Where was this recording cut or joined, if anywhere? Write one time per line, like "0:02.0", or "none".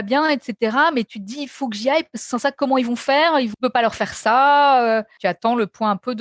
0:03.5
0:05.1